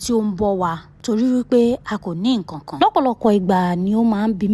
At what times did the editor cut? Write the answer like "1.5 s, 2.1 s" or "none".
2.7 s